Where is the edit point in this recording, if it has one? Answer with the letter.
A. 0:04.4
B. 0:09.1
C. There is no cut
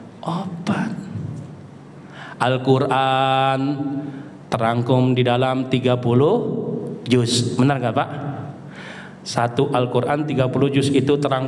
C